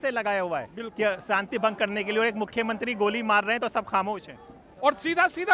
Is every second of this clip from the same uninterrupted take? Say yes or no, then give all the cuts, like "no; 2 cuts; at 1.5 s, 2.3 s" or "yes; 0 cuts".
yes; 0 cuts